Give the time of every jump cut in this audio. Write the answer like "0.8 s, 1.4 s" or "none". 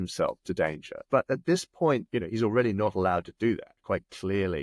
1.1 s, 2.1 s